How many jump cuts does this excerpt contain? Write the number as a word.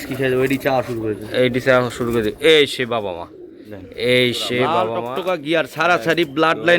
one